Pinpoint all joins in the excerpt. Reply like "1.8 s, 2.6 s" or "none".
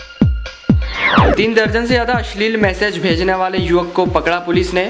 1.4 s